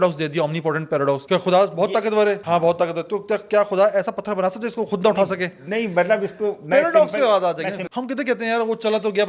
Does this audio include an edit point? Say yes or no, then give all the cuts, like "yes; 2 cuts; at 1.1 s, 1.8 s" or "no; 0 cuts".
yes; 3 cuts; at 1.2 s, 2.4 s, 7.8 s